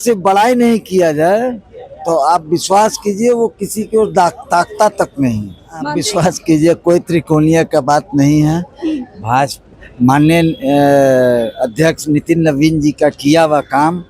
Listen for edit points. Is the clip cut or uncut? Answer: cut